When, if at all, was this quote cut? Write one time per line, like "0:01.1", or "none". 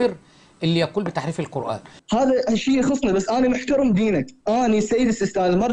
0:02.0